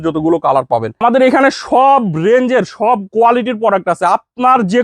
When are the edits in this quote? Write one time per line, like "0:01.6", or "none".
0:01.0

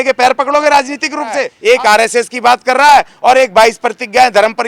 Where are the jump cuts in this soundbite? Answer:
0:01.5

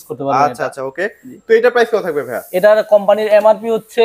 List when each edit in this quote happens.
none

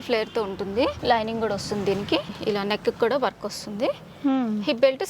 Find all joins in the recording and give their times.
0:01.0
0:02.3

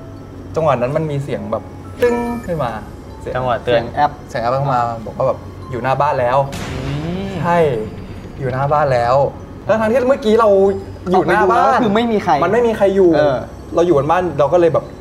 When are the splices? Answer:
0:13.5

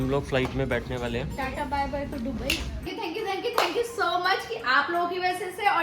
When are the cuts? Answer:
0:02.9

